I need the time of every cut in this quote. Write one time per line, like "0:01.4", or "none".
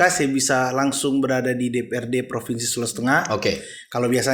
none